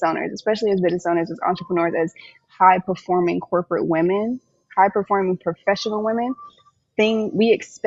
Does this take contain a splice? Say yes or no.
no